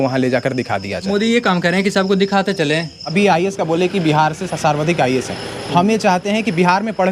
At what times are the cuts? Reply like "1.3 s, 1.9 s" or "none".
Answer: 1.1 s, 3.0 s